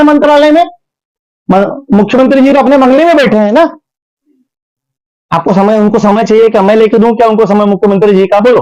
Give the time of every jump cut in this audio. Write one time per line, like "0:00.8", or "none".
none

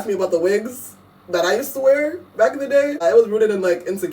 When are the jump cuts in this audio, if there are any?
0:03.0

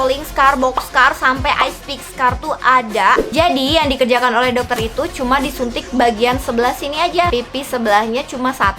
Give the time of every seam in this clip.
0:03.3
0:07.3

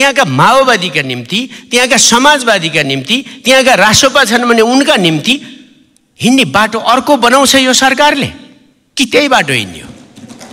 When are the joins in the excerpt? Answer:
none

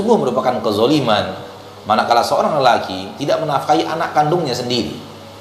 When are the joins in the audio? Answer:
none

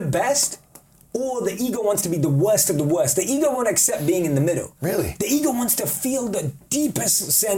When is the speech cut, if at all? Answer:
none

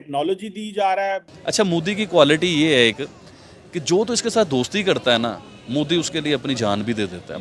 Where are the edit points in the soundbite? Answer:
0:01.3

